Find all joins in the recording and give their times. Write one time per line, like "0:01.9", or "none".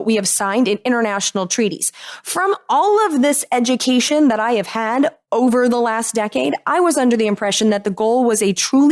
0:05.2